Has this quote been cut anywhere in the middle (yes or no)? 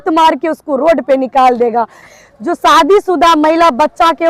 yes